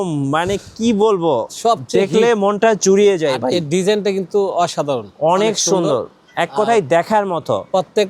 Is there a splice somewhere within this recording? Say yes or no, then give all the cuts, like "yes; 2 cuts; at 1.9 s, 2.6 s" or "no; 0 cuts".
no; 0 cuts